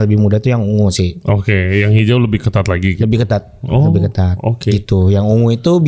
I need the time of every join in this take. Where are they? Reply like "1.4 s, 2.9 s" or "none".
none